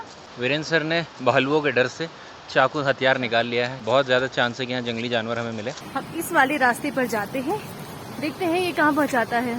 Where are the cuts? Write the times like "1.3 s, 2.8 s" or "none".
3.8 s, 5.8 s